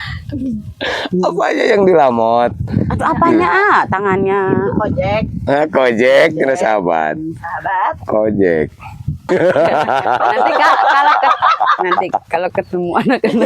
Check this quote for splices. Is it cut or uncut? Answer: cut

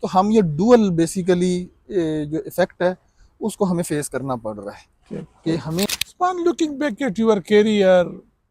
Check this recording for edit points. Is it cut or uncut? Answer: cut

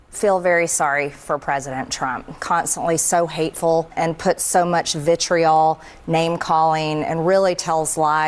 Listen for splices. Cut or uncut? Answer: cut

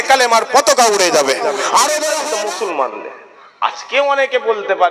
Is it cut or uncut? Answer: cut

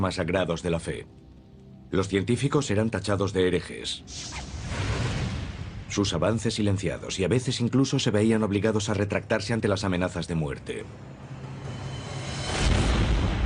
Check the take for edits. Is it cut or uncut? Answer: cut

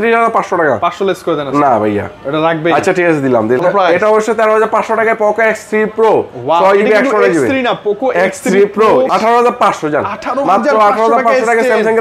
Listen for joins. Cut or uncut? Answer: cut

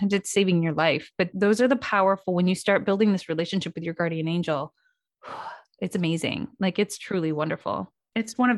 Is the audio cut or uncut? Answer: cut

